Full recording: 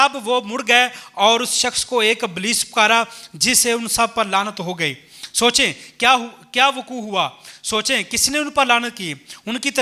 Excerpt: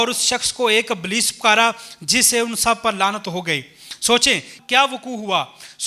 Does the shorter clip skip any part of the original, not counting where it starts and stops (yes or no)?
yes